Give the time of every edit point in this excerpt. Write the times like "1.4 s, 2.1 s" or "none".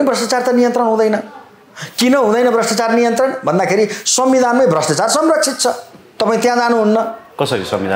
none